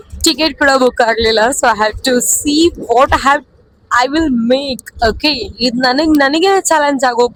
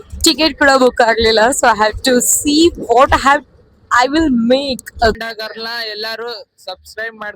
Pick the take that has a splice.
second; 1 cut; at 5.2 s

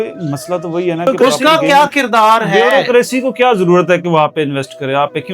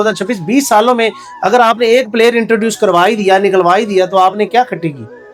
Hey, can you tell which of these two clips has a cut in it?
first; 1 cut; at 1.1 s

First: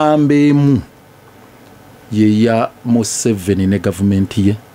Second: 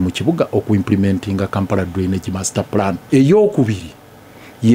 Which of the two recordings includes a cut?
second; 1 cut; at 3.0 s

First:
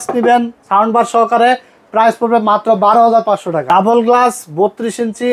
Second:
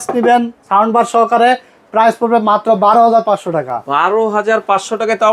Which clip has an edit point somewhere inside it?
first; 1 cut; at 3.6 s

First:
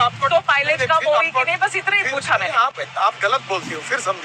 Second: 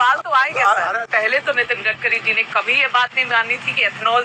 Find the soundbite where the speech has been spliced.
second; 1 cut; at 1.0 s

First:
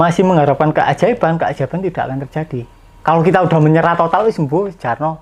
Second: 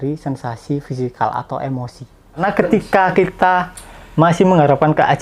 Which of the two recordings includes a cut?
second; 1 cut; at 2.4 s

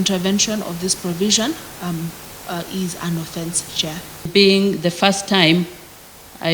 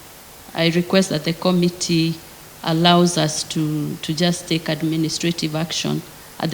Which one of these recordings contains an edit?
first; 1 cut; at 4.3 s

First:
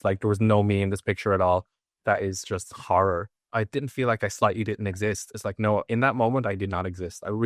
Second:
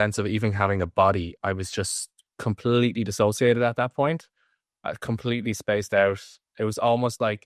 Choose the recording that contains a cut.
first; 2 cuts; at 1.9 s, 3.4 s

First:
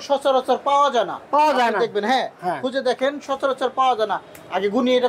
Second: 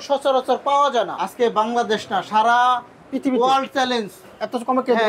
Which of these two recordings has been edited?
second; 1 cut; at 1.2 s

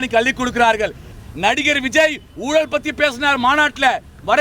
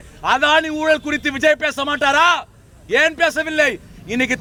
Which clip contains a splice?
first; 1 cut; at 1.1 s

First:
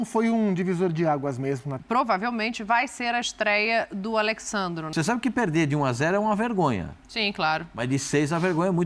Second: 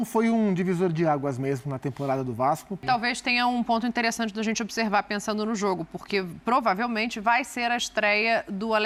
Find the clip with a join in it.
first; 2 cuts; at 1.8 s, 4.9 s

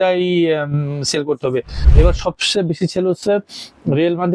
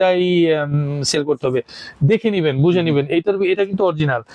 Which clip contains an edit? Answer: first; 1 cut; at 1.9 s

